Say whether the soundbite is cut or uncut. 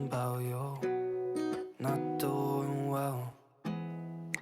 cut